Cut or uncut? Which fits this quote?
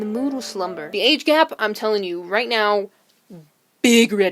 cut